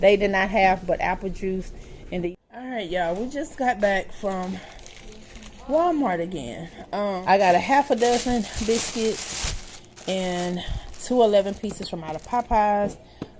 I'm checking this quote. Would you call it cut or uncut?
cut